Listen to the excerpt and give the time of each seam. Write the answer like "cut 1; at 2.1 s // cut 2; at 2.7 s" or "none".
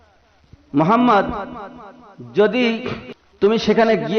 cut 1; at 3.0 s